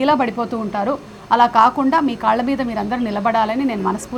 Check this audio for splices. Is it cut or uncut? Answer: uncut